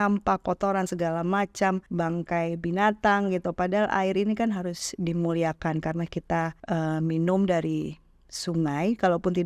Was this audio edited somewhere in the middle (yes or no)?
yes